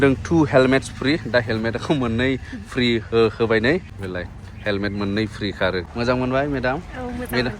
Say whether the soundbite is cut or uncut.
cut